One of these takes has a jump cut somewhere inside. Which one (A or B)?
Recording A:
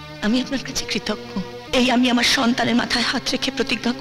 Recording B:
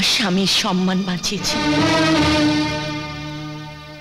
A